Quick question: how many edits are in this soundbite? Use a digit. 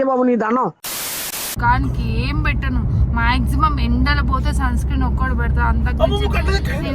1